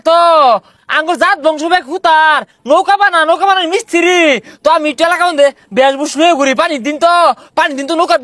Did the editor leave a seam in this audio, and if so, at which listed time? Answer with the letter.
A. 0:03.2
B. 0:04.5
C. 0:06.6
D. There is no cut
D